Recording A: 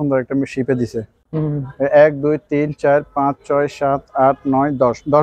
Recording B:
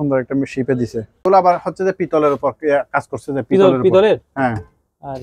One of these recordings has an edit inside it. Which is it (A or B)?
B